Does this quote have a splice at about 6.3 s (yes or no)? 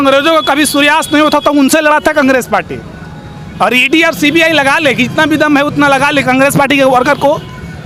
no